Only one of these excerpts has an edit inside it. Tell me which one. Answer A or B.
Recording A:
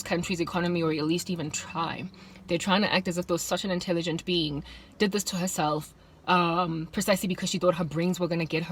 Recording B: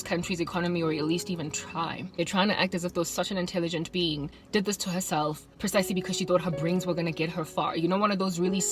B